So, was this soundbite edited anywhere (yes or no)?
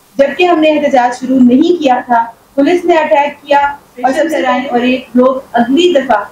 yes